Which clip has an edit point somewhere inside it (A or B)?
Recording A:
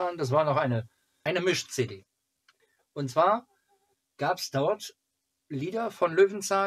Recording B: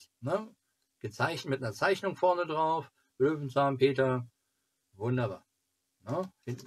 A